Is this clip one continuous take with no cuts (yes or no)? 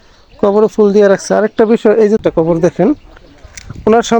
no